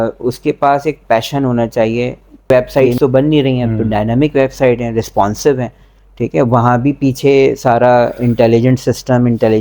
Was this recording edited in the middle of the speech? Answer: yes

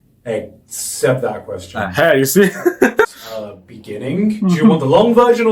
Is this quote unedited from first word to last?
no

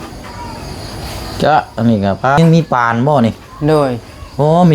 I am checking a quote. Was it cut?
yes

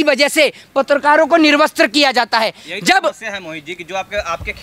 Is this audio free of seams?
yes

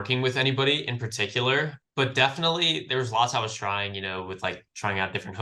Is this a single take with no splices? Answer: no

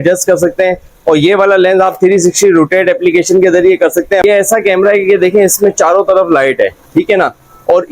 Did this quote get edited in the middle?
yes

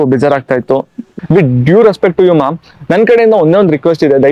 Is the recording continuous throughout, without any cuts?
no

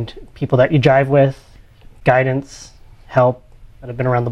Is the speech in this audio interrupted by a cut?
no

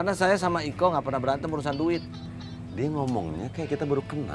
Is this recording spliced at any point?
no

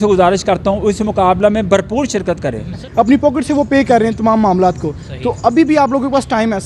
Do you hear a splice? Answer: yes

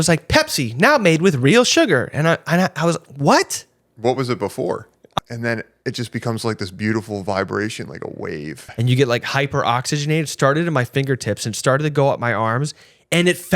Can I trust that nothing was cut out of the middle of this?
no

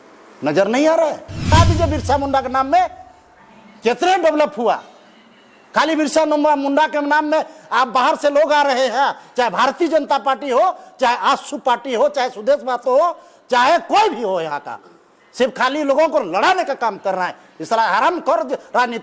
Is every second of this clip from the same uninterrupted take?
no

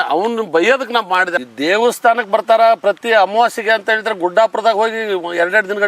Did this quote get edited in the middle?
yes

